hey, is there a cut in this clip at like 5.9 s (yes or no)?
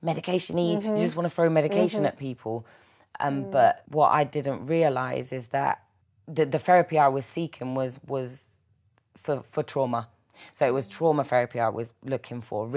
yes